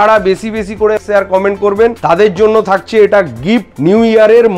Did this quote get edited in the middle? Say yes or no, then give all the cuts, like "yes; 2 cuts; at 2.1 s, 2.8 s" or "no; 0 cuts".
yes; 3 cuts; at 1.0 s, 2.0 s, 3.7 s